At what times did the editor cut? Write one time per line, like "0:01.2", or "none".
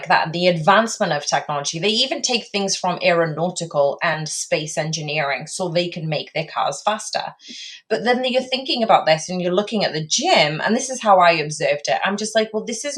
none